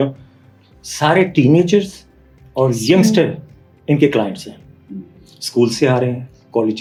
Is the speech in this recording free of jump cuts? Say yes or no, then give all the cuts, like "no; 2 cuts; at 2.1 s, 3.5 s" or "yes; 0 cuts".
yes; 0 cuts